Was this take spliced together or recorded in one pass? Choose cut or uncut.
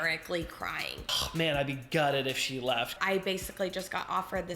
cut